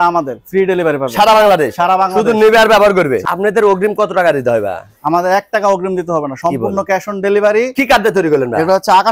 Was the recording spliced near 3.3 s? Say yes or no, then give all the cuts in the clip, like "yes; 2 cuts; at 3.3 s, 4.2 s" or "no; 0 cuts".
yes; 2 cuts; at 3.3 s, 7.7 s